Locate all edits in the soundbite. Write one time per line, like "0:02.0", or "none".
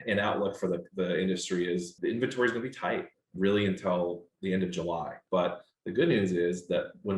0:01.9
0:03.2
0:05.2